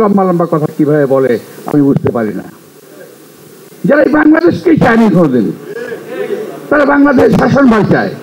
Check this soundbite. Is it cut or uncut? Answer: uncut